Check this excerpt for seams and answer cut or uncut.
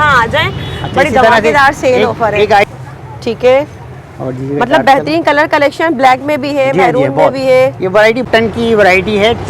cut